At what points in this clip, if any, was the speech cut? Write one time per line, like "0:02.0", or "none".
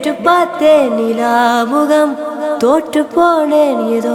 none